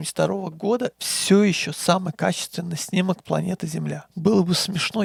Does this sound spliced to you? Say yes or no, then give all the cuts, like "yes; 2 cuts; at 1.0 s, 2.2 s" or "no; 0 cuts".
no; 0 cuts